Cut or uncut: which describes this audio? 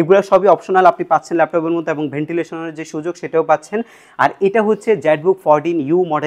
uncut